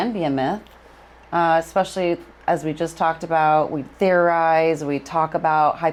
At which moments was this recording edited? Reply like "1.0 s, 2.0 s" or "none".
none